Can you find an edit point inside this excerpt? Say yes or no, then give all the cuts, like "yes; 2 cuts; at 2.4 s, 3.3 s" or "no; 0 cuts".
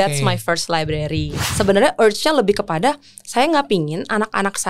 yes; 1 cut; at 1.4 s